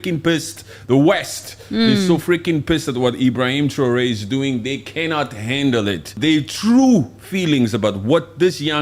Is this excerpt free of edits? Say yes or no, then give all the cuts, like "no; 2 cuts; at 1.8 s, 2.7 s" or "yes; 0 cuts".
no; 1 cut; at 6.2 s